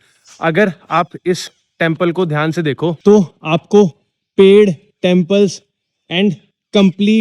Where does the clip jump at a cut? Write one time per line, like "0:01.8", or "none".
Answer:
0:03.0

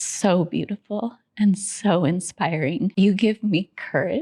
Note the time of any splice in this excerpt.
0:02.9

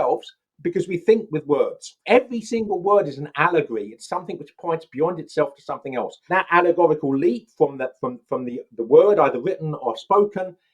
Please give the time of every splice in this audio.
0:01.9
0:06.2

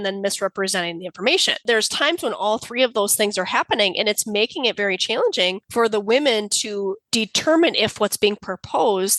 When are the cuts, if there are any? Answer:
0:01.6
0:05.6
0:07.0

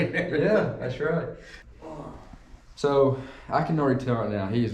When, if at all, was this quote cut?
0:01.5

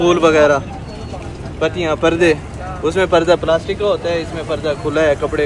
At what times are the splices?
none

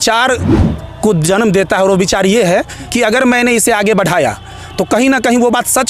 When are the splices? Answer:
0:02.8

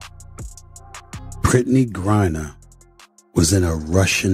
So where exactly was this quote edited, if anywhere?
0:01.4

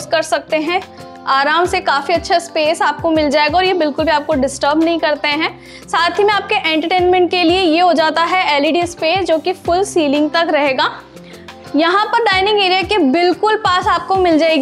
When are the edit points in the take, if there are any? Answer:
none

